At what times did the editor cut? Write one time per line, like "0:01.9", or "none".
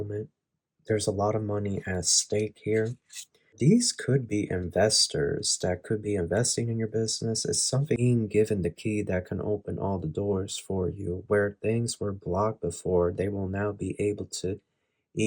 0:03.6
0:08.0